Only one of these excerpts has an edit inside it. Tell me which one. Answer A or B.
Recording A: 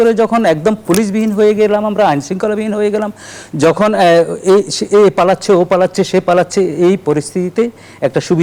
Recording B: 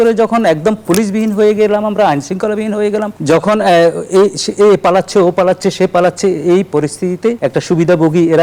B